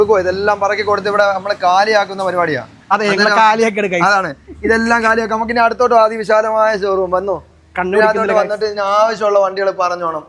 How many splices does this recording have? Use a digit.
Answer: 0